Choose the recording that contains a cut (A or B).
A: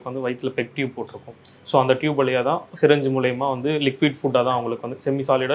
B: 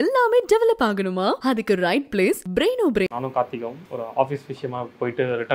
B